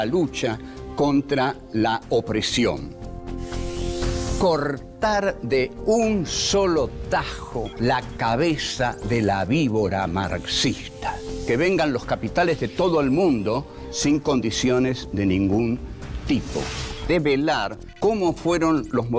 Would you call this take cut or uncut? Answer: cut